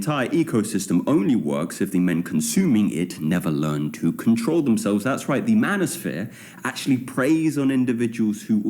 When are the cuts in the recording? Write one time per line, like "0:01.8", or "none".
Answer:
0:01.0

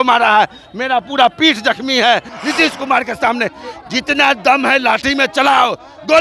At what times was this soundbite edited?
0:02.3

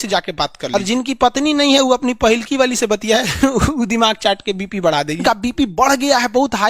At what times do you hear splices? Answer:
0:00.7
0:05.2

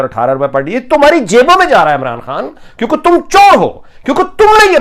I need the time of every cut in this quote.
none

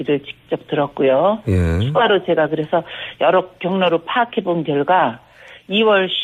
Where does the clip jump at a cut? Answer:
none

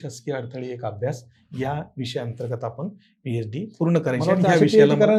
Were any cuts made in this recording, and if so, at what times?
none

